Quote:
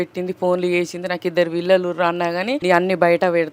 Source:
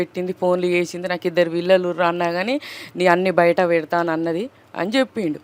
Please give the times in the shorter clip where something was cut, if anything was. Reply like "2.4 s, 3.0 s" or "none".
2.6 s

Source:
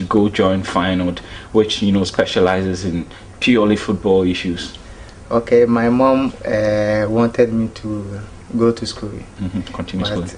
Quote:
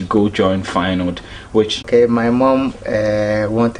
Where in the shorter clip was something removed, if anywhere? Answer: 1.8 s

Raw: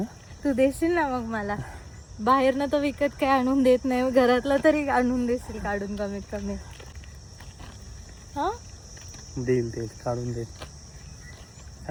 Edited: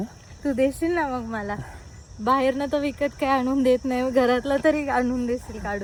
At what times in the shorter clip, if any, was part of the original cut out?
none

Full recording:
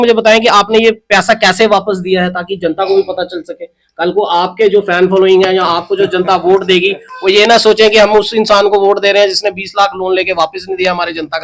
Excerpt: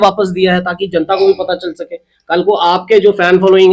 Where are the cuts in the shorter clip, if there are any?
none

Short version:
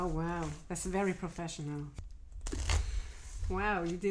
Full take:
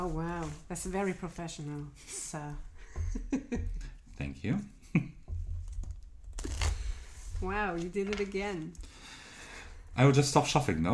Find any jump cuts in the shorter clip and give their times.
2.1 s

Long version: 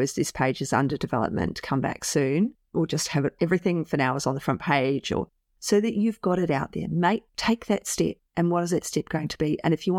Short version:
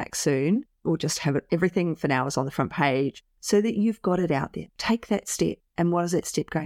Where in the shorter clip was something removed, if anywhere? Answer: 3.2 s, 4.7 s

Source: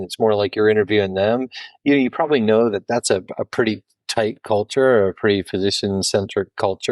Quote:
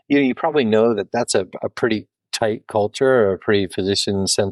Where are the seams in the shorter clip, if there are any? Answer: none

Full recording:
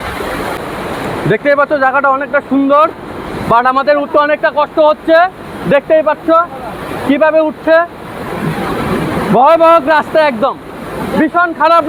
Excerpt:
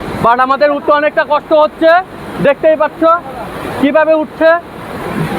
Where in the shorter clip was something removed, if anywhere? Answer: none

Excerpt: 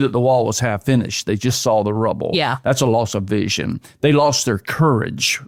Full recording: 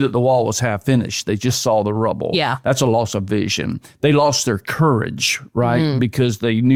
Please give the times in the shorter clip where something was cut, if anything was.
none

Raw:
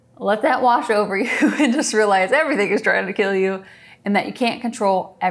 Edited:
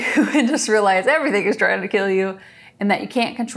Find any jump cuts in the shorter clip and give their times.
none

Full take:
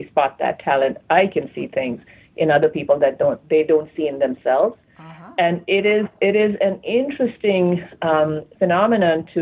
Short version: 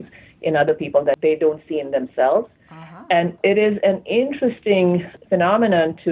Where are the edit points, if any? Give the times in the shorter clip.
1.2 s, 3.3 s, 5.1 s

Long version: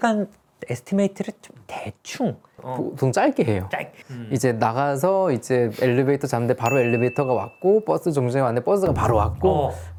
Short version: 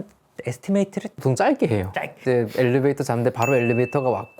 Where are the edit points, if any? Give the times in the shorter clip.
1.2 s, 2.2 s

